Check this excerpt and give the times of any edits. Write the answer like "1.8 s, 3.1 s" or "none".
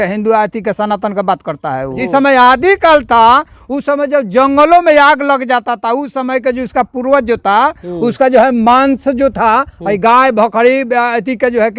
2.0 s